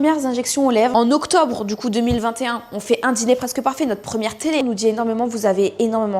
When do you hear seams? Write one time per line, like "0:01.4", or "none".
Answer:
0:00.9
0:04.6